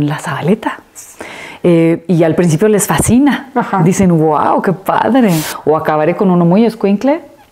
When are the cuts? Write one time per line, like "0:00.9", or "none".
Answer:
0:05.5